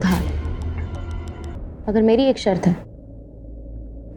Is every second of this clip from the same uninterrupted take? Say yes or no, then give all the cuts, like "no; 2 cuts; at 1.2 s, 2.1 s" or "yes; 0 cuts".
no; 1 cut; at 1.6 s